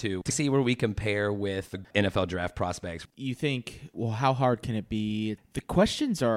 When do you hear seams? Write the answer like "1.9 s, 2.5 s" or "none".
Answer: 1.9 s, 3.0 s, 3.9 s, 5.4 s